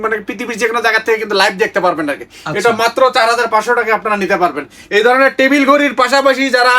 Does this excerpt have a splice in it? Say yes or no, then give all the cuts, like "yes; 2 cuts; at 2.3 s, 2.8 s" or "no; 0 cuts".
no; 0 cuts